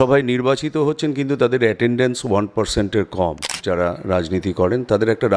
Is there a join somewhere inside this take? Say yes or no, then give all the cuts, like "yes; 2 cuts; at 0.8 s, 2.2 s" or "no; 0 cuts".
yes; 1 cut; at 3.6 s